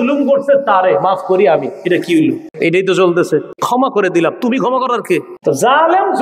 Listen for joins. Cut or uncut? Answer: cut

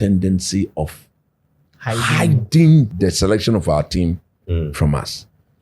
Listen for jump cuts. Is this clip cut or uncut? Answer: cut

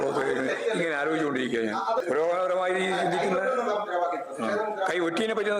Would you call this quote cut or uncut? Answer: cut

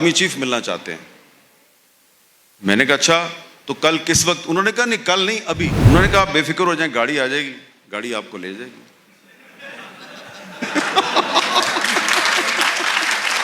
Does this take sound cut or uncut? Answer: cut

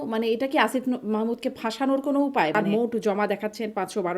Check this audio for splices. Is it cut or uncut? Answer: cut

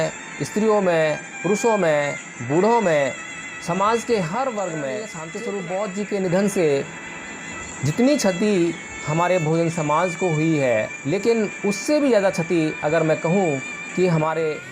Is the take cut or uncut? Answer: cut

